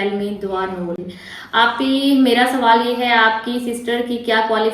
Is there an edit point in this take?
yes; 1 cut; at 1.2 s

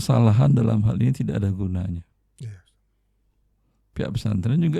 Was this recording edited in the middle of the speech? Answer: no; 0 cuts

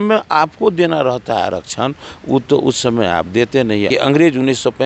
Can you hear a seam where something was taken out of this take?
yes; 1 cut; at 3.9 s

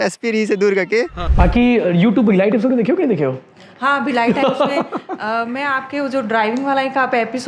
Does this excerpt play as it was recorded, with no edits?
no; 1 cut; at 1.2 s

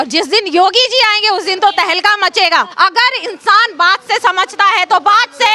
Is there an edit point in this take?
yes; 1 cut; at 2.7 s

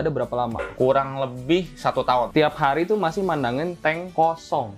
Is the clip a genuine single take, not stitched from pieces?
no; 1 cut; at 2.3 s

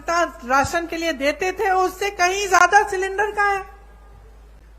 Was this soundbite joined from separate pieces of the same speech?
no; 0 cuts

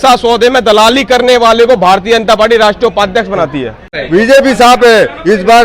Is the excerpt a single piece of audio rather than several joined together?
no; 1 cut; at 3.9 s

